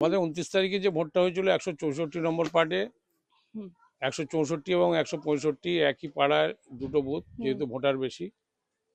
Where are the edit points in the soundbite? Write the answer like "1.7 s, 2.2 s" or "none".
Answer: none